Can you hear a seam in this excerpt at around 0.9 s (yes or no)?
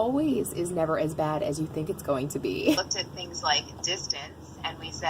no